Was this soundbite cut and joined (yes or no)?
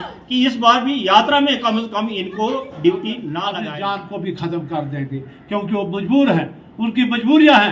yes